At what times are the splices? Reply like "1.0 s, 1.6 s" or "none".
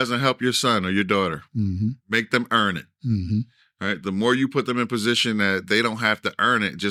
none